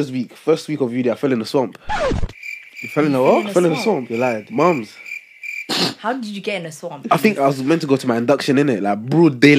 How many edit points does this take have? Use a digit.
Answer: 0